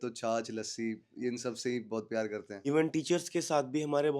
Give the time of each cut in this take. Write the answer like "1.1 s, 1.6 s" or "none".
2.5 s